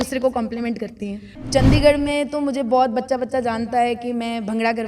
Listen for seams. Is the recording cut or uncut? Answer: cut